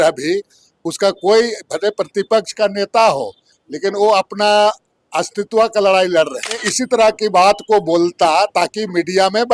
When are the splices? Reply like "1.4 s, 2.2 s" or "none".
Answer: 6.7 s